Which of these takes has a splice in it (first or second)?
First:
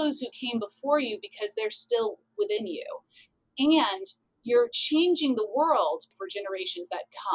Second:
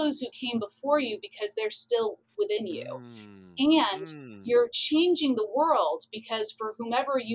first